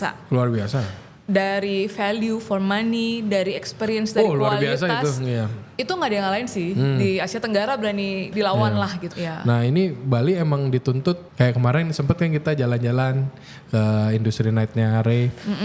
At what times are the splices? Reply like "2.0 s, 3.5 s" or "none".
9.1 s, 11.3 s